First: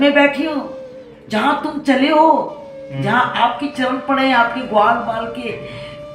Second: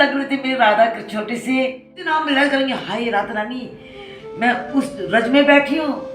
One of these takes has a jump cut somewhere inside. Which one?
second; 1 cut; at 2.0 s

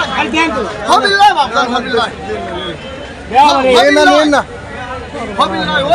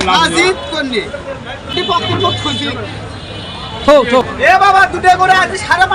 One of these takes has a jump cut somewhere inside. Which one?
second; 2 cuts; at 1.7 s, 4.3 s

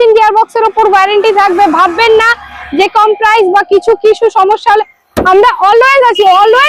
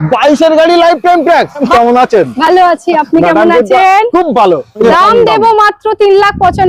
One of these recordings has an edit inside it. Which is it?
second; 2 cuts; at 1.7 s, 4.7 s

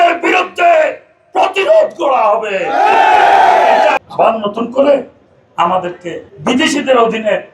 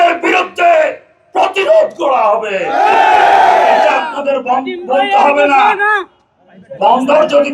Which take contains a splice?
first; 2 cuts; at 4.1 s, 6.2 s

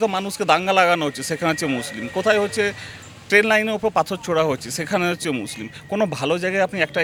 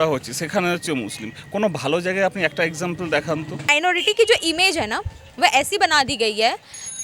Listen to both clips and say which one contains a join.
second; 1 cut; at 3.7 s

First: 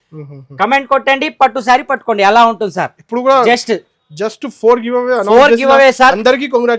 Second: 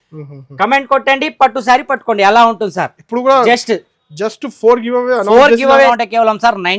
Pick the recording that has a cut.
second; 1 cut; at 5.9 s

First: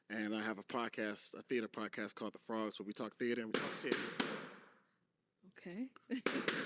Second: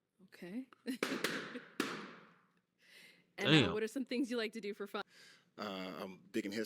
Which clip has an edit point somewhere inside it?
second; 1 cut; at 5.1 s

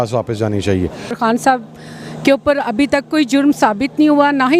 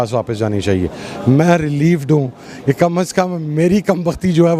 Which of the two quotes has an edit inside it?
first; 1 cut; at 1.1 s

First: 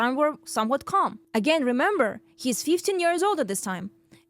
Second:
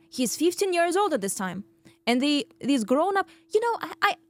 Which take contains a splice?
first; 1 cut; at 1.2 s

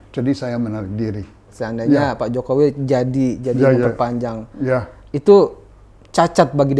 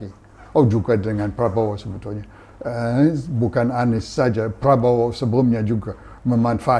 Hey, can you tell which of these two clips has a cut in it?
first; 1 cut; at 1.5 s

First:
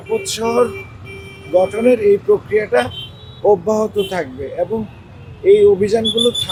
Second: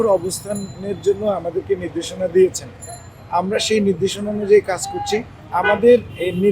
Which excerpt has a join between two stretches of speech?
second; 1 cut; at 5.4 s

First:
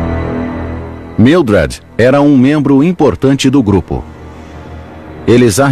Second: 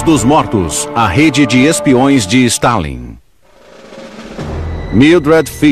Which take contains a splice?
first; 1 cut; at 3.9 s

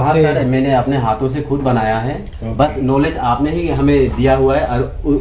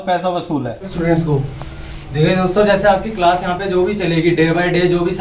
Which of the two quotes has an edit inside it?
second; 1 cut; at 0.9 s

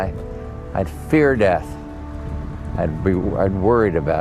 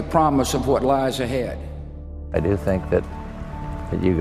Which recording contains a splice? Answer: second; 1 cut; at 2.1 s

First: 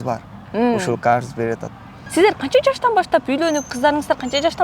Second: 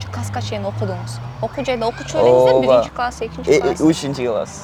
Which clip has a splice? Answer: first; 1 cut; at 2.0 s

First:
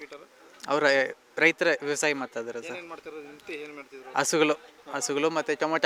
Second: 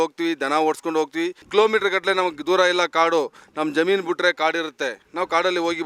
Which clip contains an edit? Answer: second; 1 cut; at 1.5 s

